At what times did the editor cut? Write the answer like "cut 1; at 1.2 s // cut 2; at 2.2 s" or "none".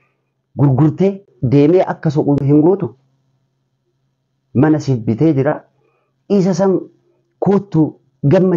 cut 1; at 1.3 s // cut 2; at 2.4 s